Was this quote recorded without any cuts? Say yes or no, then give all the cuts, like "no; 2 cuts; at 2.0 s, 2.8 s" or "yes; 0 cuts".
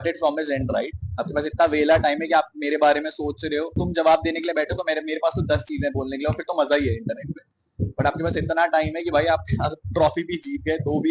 no; 1 cut; at 3.8 s